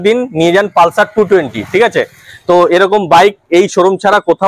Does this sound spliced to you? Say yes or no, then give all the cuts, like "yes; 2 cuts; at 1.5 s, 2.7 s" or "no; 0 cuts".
no; 0 cuts